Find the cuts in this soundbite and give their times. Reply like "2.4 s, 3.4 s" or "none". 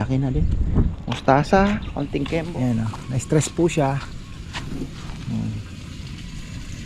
2.2 s